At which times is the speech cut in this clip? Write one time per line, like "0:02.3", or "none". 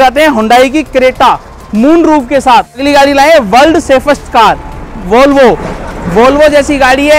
0:02.8